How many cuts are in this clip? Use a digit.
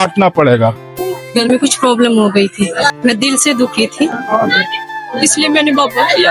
2